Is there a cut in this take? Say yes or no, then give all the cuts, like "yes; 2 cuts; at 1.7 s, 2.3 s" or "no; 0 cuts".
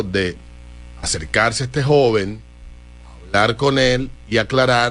no; 0 cuts